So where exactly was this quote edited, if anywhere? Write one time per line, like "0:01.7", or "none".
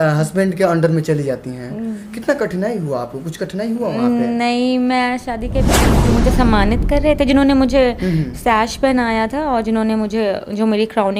0:05.8